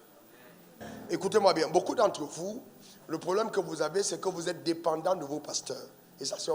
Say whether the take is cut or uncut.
cut